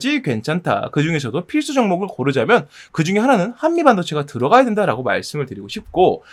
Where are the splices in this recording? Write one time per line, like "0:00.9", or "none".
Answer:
none